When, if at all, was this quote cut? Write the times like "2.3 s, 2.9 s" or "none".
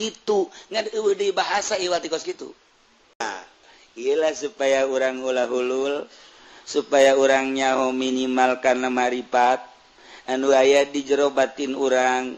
3.2 s

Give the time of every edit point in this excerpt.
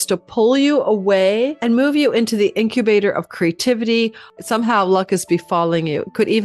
1.6 s, 4.3 s

